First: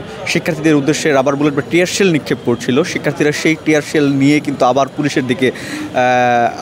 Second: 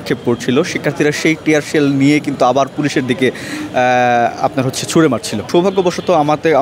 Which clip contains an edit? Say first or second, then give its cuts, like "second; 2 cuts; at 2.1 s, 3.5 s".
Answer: second; 1 cut; at 5.5 s